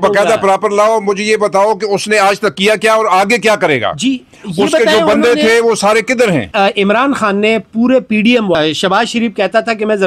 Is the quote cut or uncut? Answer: cut